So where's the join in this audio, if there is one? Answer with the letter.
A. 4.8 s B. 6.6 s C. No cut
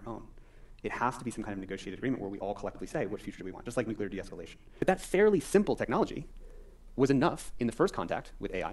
A